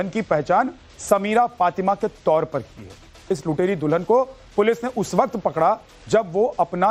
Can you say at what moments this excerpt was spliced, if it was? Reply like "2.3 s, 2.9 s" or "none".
1.8 s